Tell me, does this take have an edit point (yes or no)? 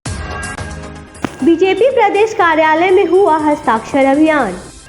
yes